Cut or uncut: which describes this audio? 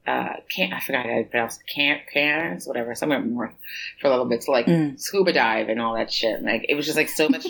uncut